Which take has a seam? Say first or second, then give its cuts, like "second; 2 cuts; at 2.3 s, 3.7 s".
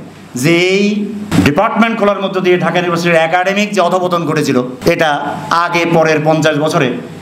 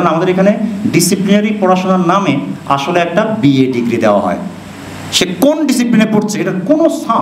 first; 2 cuts; at 1.3 s, 4.7 s